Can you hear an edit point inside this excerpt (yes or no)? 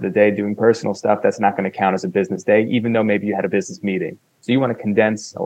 no